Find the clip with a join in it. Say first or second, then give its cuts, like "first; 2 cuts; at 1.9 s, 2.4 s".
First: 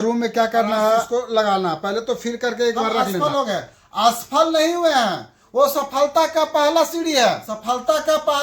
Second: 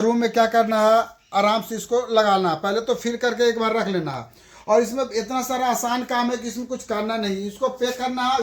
first; 3 cuts; at 1.1 s, 3.2 s, 7.5 s